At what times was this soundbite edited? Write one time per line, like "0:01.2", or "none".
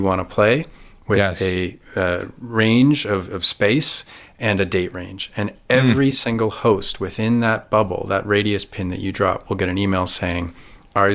none